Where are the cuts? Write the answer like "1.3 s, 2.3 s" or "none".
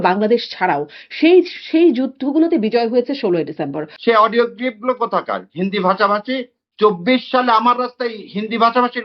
3.9 s